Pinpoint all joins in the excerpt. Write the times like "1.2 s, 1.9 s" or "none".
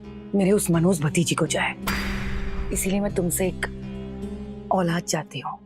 2.5 s